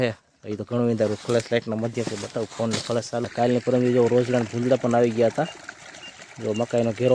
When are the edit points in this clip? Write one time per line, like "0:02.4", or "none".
0:03.3